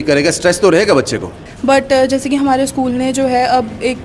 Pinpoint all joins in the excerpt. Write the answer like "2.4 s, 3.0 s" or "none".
1.5 s